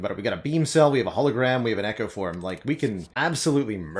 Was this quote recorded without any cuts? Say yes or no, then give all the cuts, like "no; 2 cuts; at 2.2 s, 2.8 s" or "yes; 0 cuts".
no; 1 cut; at 3.1 s